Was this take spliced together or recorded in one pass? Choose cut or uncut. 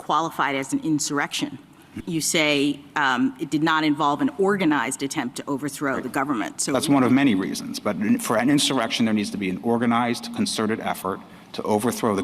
cut